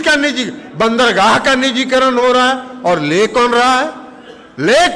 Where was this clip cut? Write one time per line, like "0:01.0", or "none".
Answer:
none